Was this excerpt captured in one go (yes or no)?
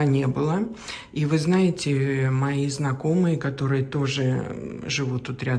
yes